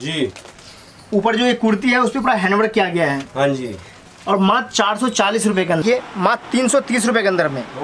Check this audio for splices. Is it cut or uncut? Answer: cut